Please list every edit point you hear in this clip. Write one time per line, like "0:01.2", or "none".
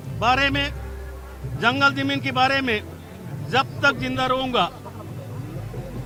none